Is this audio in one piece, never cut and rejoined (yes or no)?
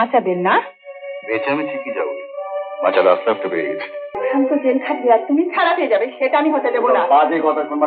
no